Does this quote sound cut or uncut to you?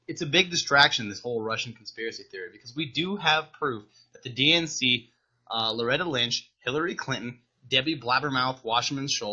cut